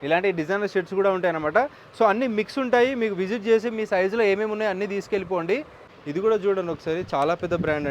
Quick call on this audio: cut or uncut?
cut